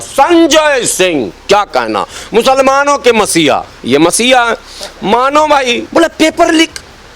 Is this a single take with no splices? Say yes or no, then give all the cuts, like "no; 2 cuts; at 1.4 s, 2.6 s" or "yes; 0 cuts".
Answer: no; 1 cut; at 5.8 s